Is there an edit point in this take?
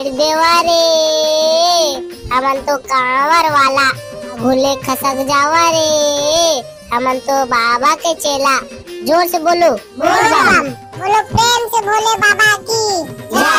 no; 0 cuts

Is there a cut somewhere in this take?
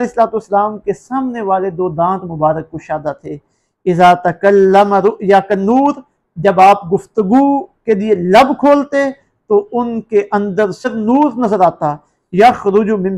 yes; 1 cut; at 10.8 s

